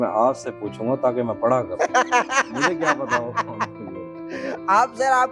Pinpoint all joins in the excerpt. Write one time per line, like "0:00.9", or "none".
none